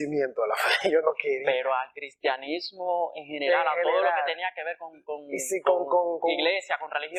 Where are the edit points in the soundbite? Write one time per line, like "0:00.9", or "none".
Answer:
none